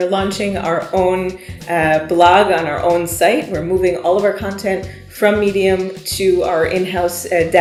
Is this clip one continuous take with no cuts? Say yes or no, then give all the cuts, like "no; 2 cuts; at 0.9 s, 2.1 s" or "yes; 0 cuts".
yes; 0 cuts